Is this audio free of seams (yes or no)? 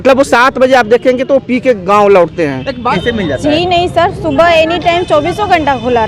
no